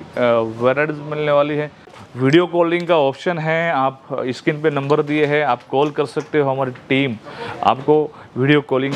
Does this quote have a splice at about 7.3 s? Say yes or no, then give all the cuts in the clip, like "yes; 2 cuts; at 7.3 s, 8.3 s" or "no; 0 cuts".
no; 1 cut; at 2.0 s